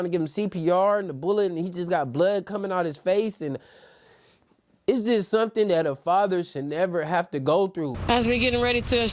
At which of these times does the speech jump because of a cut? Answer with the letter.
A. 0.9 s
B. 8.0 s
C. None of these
B